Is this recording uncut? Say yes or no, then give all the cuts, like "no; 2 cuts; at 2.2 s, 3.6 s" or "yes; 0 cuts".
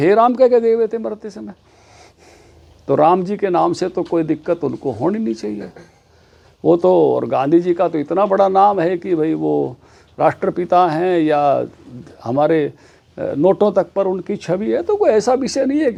yes; 0 cuts